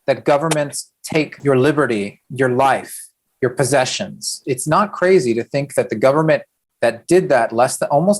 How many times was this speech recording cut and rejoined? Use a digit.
2